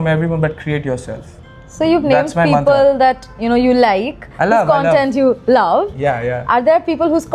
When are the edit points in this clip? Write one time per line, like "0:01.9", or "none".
none